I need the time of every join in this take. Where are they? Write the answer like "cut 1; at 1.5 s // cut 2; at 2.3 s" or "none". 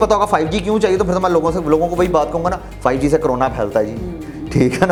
none